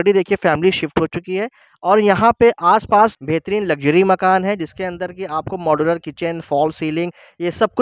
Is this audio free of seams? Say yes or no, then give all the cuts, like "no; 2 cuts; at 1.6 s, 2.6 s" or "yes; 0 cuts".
no; 1 cut; at 3.2 s